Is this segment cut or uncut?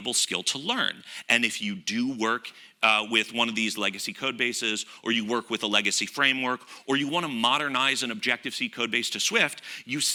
uncut